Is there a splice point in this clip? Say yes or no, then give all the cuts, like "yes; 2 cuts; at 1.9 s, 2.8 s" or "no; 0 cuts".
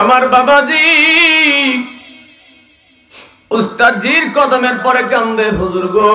no; 0 cuts